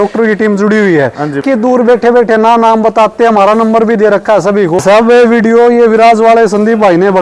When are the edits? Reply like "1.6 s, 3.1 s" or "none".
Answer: 1.4 s, 4.8 s